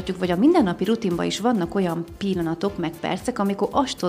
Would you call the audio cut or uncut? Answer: uncut